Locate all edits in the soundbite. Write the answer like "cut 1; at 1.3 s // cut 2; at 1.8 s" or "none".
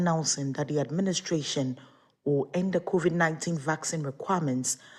none

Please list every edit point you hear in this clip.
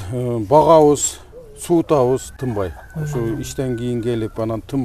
none

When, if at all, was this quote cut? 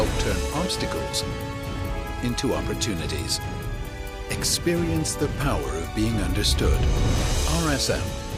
none

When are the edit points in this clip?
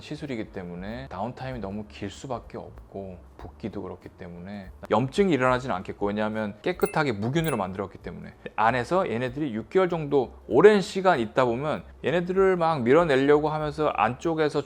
cut 1; at 4.7 s

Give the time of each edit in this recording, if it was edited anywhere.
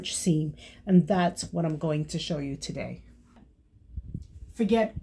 cut 1; at 3.4 s

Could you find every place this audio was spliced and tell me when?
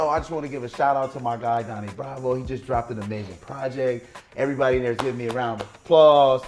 none

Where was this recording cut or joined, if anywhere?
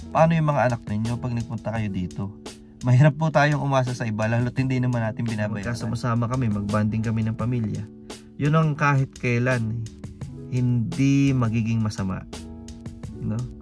cut 1; at 5.7 s

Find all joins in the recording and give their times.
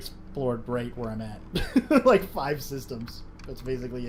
none

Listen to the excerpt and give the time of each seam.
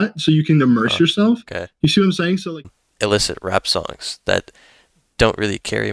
cut 1; at 2.5 s

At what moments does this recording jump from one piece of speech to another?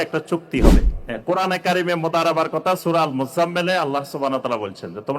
cut 1; at 1.0 s

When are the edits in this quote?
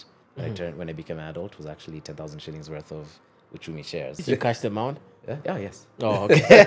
cut 1; at 4.2 s

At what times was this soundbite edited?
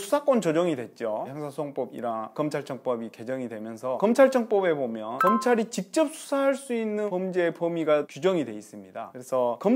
none

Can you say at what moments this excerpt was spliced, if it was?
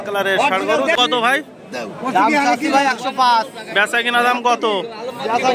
cut 1; at 1.0 s

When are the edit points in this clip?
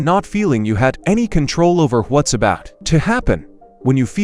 none

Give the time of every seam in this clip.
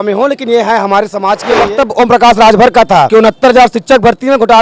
cut 1; at 1.5 s // cut 2; at 3.1 s

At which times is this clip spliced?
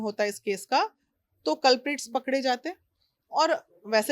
none

